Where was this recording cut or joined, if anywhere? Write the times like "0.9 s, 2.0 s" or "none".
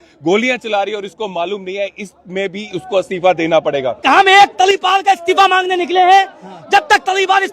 4.0 s